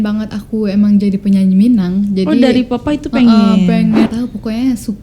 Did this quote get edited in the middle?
yes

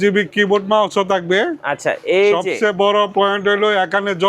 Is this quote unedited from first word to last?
yes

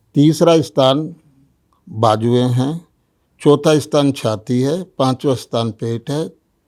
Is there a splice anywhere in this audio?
no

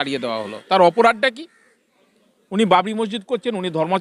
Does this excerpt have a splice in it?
no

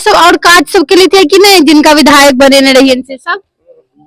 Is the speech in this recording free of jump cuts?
yes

